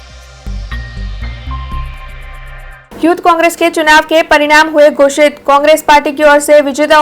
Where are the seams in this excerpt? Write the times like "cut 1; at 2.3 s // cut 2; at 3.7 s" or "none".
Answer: cut 1; at 2.7 s